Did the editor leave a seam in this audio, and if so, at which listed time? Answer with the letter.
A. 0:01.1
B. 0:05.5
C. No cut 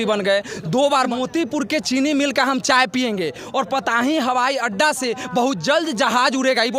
A